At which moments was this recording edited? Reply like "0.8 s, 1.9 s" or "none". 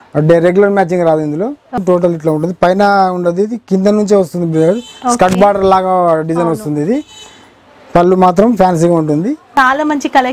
1.8 s, 9.5 s